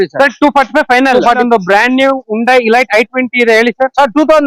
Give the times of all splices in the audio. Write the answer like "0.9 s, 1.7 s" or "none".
1.4 s